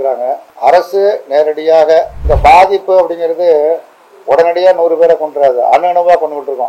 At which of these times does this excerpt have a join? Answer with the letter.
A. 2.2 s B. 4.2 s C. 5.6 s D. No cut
A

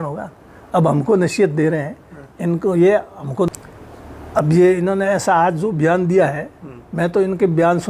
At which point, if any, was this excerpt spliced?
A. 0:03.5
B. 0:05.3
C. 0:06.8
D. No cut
A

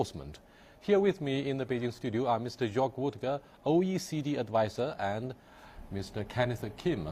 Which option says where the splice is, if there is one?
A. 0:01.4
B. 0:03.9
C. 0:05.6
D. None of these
A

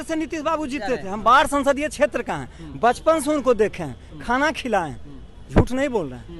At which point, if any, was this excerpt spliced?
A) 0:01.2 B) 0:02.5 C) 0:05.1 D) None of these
D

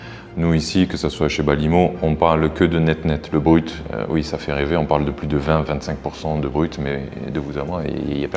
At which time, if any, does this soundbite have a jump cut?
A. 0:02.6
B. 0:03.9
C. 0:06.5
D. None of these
D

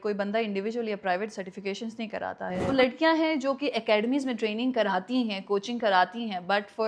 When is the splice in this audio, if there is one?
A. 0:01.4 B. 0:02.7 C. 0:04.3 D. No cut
B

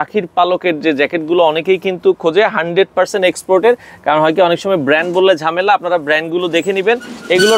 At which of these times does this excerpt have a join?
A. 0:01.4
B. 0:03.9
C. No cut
C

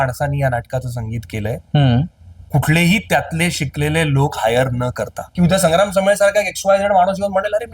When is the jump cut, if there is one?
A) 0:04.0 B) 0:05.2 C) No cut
B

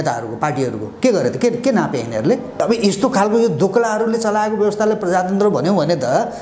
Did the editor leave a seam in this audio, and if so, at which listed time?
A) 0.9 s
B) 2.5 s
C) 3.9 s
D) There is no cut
B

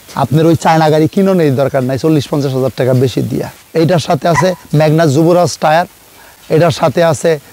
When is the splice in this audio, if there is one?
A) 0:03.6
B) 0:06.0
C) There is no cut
A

